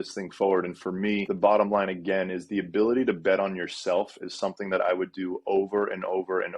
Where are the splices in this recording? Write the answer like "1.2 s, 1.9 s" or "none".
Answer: 1.3 s